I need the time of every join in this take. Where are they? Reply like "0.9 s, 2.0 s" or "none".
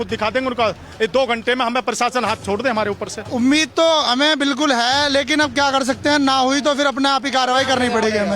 3.2 s